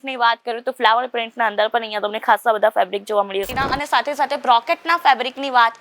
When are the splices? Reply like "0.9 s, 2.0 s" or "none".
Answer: 3.5 s